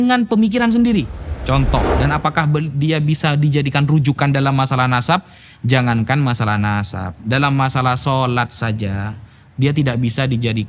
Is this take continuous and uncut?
no; 1 cut; at 1.9 s

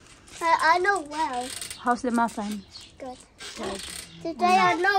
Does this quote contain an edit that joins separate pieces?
no; 0 cuts

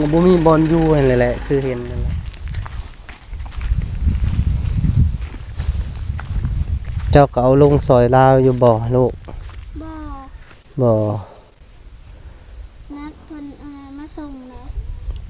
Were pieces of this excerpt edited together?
yes; 1 cut; at 1.8 s

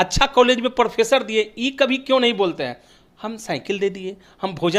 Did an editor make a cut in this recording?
no; 0 cuts

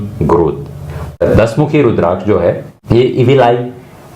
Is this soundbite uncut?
no; 2 cuts; at 1.2 s, 2.7 s

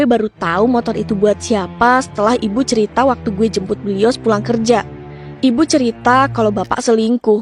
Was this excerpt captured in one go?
yes; 0 cuts

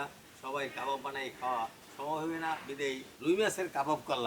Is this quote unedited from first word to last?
no; 1 cut; at 3.1 s

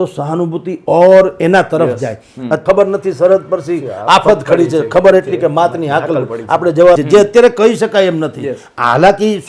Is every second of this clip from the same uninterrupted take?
no; 2 cuts; at 2.6 s, 7.0 s

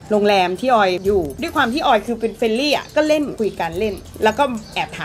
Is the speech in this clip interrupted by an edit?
yes; 2 cuts; at 1.2 s, 3.3 s

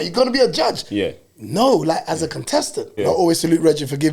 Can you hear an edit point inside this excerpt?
yes; 1 cut; at 2.9 s

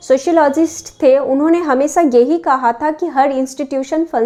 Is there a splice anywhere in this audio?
no; 0 cuts

